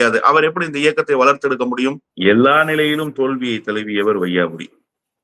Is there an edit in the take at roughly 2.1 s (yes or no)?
yes